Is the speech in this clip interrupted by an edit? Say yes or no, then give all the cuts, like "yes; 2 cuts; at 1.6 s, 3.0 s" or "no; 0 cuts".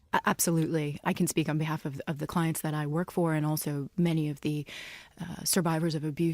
yes; 1 cut; at 1.0 s